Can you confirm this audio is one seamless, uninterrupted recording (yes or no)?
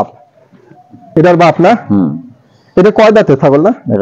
no